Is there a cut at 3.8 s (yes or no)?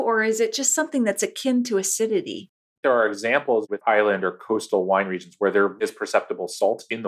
yes